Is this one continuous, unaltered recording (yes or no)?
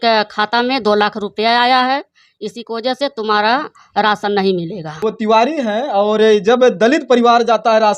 no